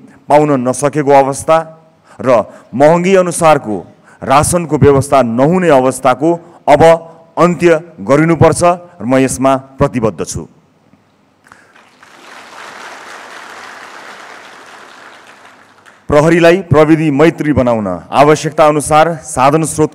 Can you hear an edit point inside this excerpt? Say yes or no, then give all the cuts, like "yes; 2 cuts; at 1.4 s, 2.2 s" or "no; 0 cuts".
no; 0 cuts